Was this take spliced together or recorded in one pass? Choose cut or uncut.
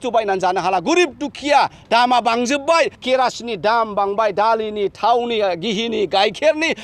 cut